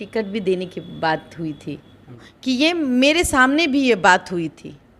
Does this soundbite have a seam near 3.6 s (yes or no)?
no